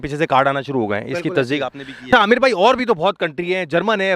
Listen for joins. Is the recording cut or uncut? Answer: cut